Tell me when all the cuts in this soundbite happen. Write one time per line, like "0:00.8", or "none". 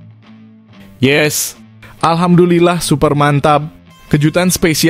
0:01.0